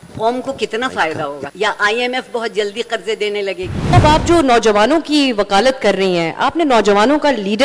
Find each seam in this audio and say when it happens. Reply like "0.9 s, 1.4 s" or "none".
1.5 s, 3.7 s